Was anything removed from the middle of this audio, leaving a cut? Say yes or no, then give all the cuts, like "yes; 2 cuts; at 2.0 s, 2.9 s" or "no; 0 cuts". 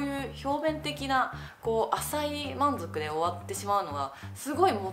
no; 0 cuts